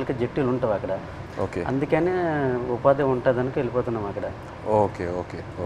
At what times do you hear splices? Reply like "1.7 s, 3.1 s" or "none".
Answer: none